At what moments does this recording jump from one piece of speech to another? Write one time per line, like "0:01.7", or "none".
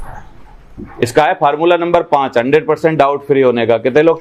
none